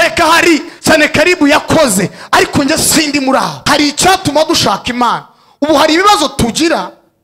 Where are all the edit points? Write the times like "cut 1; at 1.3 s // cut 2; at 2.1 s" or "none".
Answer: cut 1; at 3.6 s